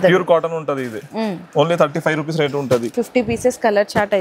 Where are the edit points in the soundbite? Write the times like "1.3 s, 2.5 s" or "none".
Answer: 2.9 s